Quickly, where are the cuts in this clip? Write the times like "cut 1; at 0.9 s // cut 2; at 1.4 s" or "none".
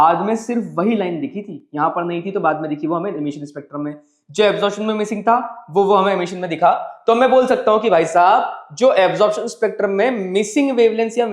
none